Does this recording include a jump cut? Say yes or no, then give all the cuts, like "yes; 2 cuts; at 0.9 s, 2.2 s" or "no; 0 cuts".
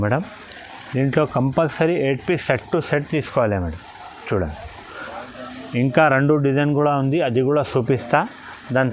no; 0 cuts